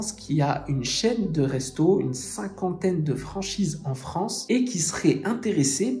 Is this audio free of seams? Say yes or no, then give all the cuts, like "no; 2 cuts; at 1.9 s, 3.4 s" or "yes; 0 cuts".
yes; 0 cuts